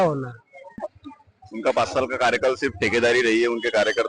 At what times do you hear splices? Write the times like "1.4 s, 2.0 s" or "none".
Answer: 0.9 s